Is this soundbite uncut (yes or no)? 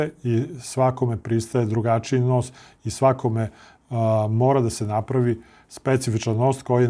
yes